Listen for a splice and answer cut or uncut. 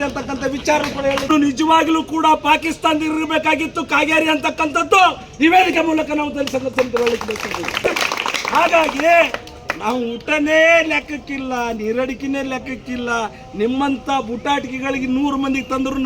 cut